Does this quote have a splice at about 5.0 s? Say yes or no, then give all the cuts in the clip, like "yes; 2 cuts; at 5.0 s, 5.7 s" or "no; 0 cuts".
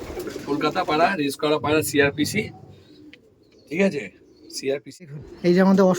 yes; 1 cut; at 5.0 s